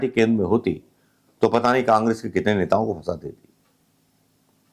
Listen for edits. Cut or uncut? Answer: uncut